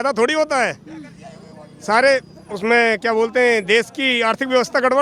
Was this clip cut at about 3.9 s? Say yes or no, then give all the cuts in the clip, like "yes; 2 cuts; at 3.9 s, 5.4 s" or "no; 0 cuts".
no; 0 cuts